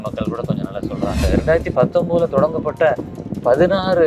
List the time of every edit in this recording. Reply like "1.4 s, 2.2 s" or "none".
1.2 s